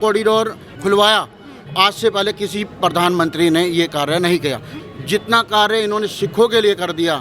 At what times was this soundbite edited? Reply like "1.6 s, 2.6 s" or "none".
4.7 s